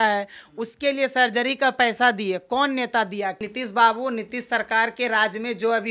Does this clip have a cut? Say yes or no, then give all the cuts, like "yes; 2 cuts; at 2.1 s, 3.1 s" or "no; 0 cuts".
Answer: yes; 1 cut; at 3.4 s